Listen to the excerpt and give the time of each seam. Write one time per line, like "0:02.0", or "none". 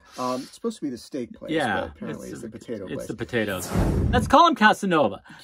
0:03.7